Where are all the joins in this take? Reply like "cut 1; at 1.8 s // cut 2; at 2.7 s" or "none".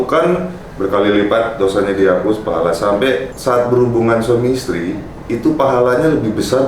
cut 1; at 3.3 s